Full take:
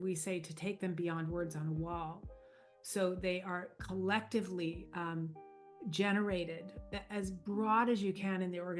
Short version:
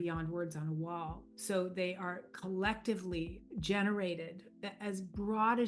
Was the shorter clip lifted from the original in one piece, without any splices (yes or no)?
no